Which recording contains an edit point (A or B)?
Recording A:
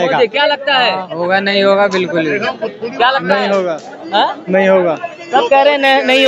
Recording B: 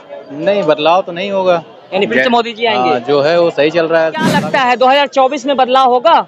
B